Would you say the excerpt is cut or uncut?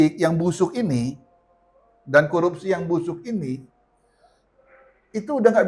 uncut